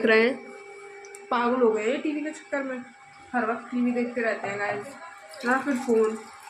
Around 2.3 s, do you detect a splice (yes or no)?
no